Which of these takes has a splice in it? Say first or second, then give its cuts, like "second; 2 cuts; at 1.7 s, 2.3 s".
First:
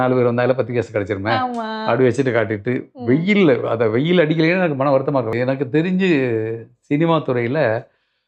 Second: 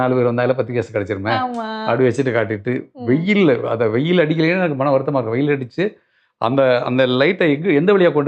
first; 1 cut; at 5.3 s